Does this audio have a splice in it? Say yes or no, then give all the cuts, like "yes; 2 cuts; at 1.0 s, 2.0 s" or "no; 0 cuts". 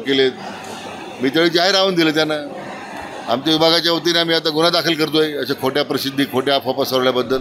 no; 0 cuts